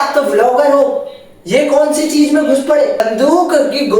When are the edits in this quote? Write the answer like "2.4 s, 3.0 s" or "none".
3.0 s